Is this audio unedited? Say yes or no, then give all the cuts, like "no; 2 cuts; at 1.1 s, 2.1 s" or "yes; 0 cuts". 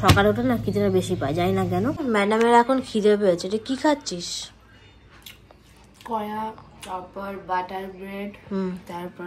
no; 1 cut; at 2.0 s